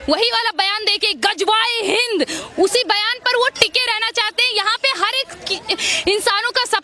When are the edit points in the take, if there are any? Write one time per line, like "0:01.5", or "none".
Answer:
none

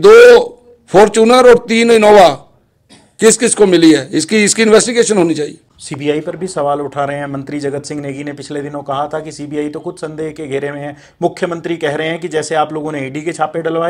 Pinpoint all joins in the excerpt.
none

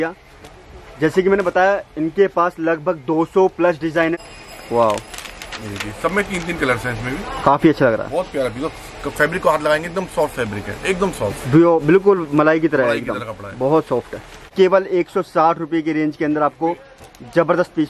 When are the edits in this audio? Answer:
0:04.2
0:14.5

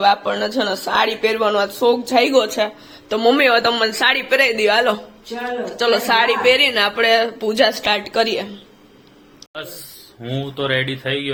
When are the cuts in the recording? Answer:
none

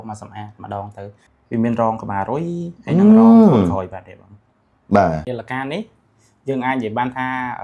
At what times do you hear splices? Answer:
0:01.1
0:05.3

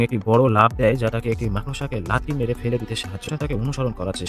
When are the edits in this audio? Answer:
0:03.2

